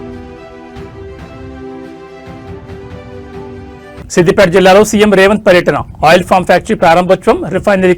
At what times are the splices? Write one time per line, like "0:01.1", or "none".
0:03.5